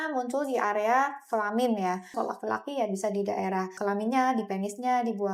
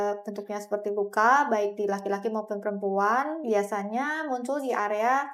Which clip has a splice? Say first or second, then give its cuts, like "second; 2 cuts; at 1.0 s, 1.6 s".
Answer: first; 2 cuts; at 2.1 s, 3.8 s